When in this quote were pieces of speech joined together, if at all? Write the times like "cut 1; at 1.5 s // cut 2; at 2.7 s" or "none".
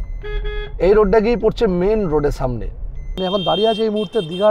cut 1; at 3.1 s